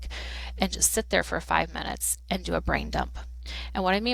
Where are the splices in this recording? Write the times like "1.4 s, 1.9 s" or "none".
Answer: none

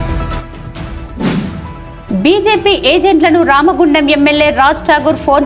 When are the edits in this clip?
1.4 s

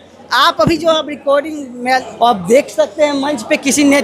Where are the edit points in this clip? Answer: 2.0 s

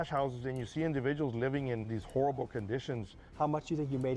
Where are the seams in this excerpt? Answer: 2.0 s, 3.2 s

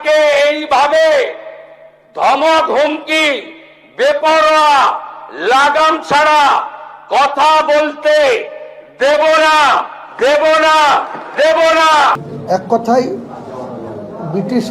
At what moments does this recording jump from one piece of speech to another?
12.2 s

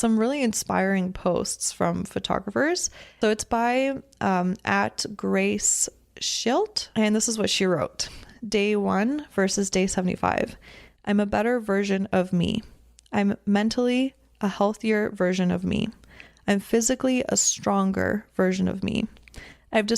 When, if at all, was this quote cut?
3.2 s, 6.8 s

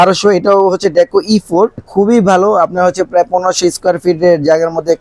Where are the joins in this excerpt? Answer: 1.8 s

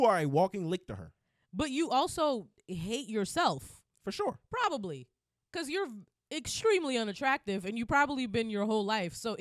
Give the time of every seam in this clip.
none

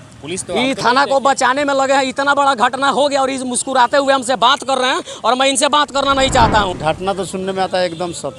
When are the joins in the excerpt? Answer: 6.7 s

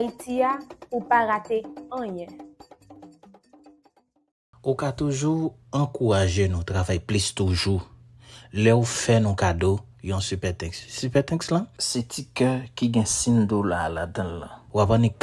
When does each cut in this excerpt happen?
4.5 s

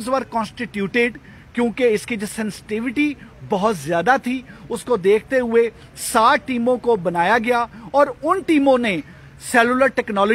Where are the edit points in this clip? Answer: none

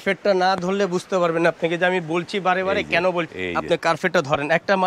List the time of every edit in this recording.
3.4 s

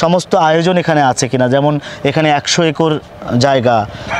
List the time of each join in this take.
none

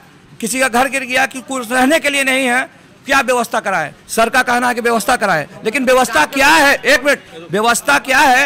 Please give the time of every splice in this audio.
none

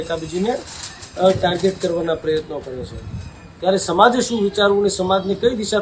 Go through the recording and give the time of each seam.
none

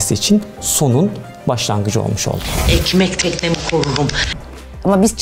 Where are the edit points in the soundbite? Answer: 2.5 s, 4.2 s

